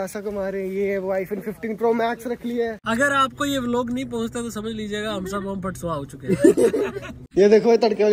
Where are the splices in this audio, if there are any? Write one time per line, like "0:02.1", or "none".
0:02.8
0:07.2